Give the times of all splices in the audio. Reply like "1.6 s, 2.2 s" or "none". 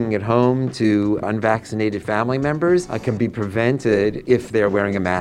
1.2 s, 2.9 s, 4.2 s